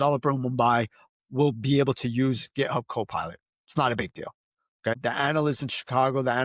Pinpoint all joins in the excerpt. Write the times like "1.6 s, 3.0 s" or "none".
4.9 s